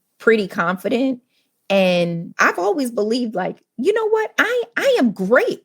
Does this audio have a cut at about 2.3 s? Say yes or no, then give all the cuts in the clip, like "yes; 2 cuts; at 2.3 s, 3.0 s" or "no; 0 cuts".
yes; 1 cut; at 2.3 s